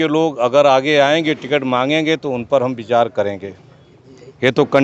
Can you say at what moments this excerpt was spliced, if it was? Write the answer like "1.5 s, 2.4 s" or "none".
none

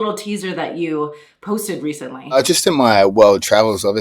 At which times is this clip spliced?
2.4 s

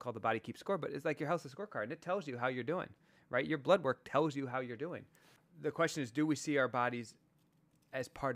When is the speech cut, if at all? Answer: 5.4 s

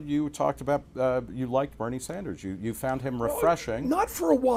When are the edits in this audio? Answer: none

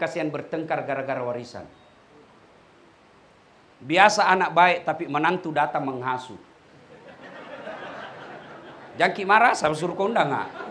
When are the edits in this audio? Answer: none

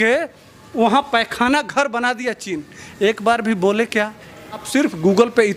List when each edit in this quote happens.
4.6 s

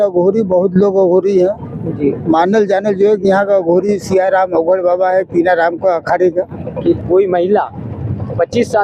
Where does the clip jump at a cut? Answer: 7.0 s

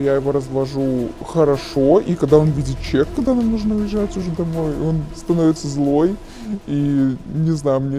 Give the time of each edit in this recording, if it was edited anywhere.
none

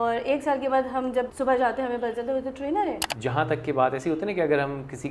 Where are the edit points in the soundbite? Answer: 1.3 s, 3.1 s

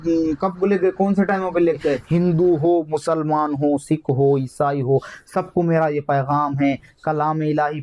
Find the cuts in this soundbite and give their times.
2.0 s

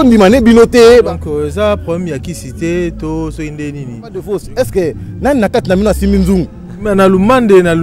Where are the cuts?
0.9 s

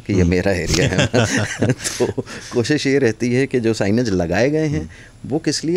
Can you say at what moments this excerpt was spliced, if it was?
none

